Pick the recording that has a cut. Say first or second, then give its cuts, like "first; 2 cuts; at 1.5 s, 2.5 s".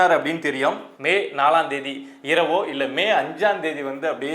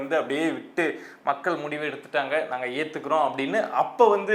first; 1 cut; at 0.9 s